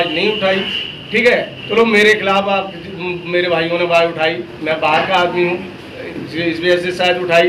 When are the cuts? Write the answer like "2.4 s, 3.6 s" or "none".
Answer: none